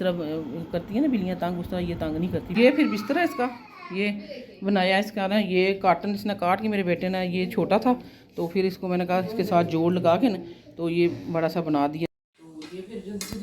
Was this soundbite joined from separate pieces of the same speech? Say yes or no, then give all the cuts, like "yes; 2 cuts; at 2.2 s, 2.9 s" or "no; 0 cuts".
yes; 2 cuts; at 2.5 s, 12.3 s